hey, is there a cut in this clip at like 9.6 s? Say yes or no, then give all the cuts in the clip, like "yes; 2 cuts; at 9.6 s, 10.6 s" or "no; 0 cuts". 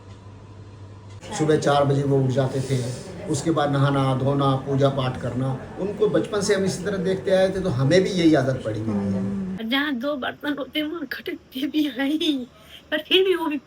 yes; 2 cuts; at 1.2 s, 9.6 s